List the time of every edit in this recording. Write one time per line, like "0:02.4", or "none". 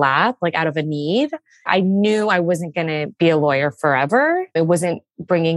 0:01.7
0:03.1
0:04.5